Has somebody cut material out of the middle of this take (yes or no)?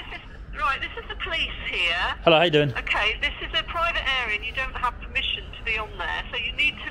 no